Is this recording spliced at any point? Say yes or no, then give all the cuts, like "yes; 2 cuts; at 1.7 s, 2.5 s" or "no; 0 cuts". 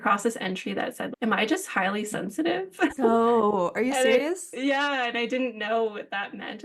no; 0 cuts